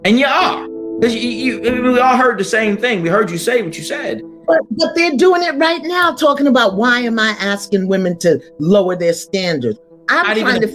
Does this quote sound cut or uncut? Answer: uncut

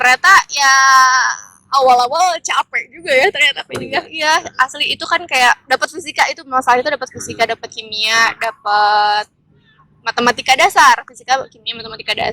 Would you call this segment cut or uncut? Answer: uncut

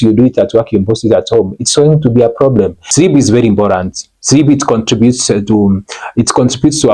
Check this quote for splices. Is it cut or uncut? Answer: cut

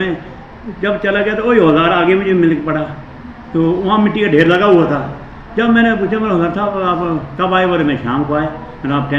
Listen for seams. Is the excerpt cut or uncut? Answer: uncut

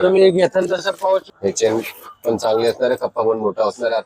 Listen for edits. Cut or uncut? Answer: cut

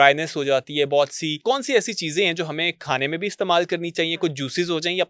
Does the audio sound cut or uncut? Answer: cut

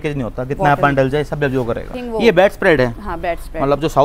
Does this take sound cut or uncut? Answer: cut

